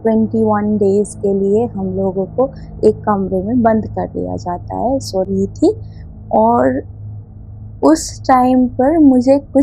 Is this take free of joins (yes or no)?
no